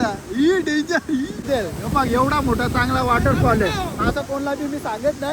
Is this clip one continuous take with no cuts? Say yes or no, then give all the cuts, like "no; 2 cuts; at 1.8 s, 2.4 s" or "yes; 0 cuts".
no; 1 cut; at 1.5 s